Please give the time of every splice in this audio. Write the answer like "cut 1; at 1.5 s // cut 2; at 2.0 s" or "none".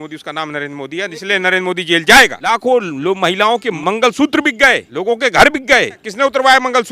cut 1; at 2.4 s // cut 2; at 3.7 s // cut 3; at 4.9 s // cut 4; at 6.1 s